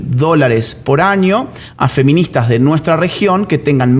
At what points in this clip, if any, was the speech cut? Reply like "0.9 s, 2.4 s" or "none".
none